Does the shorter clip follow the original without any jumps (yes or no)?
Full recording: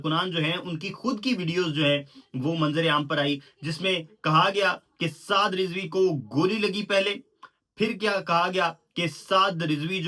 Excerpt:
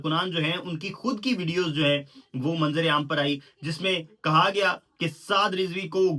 yes